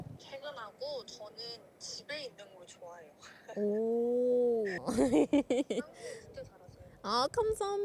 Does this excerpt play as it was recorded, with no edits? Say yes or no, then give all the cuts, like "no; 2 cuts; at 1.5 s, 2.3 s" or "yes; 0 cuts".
yes; 0 cuts